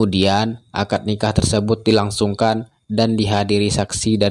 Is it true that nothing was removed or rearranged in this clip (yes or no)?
yes